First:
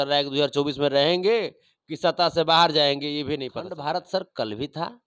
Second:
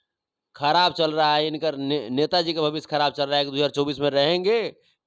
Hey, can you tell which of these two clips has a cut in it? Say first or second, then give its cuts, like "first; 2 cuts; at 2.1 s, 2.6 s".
first; 1 cut; at 3.7 s